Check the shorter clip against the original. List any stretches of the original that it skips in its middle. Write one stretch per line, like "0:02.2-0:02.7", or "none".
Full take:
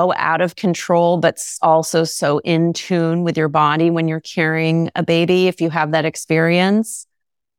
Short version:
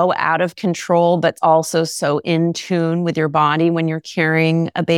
0:01.4-0:01.6